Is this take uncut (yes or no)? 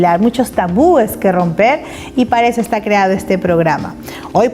no